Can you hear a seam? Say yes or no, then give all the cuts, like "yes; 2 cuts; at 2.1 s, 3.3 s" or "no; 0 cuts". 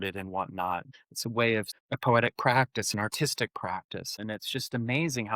yes; 3 cuts; at 0.9 s, 1.7 s, 4.2 s